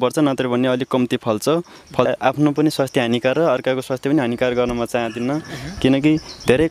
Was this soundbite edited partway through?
yes; 1 cut; at 2.1 s

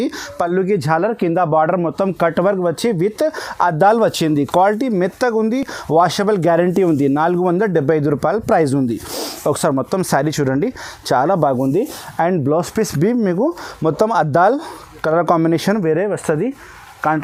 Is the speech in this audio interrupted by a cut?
no; 0 cuts

